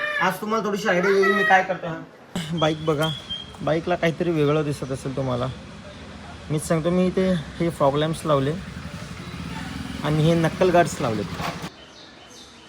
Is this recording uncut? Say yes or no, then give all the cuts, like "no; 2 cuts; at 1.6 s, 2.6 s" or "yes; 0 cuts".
no; 2 cuts; at 2.3 s, 11.7 s